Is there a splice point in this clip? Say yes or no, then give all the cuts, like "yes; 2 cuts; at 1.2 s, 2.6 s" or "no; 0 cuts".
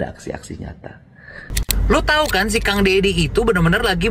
yes; 1 cut; at 1.5 s